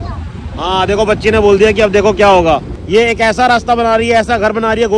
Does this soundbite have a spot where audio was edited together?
yes; 1 cut; at 2.7 s

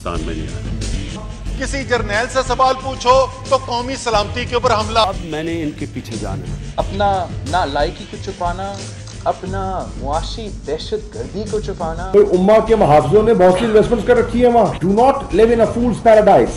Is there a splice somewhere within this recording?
no; 0 cuts

